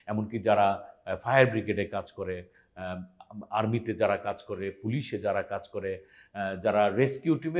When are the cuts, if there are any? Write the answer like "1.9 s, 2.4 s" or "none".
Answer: none

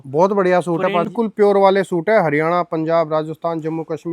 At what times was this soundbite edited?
1.1 s

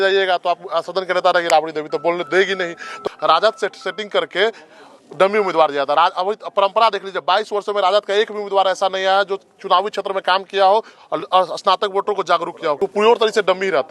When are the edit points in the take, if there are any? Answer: 3.0 s, 12.8 s

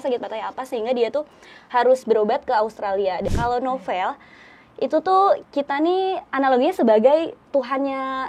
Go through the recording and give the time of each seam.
3.3 s

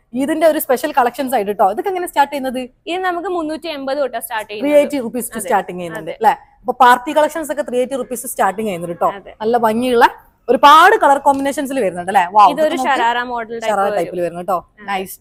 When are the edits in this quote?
none

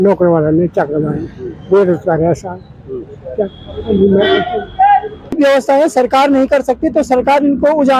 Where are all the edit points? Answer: 5.4 s

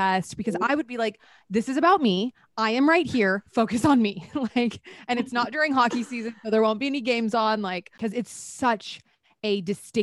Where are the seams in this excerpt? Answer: 7.9 s

